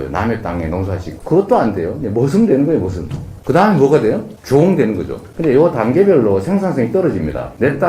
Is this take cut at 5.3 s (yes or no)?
no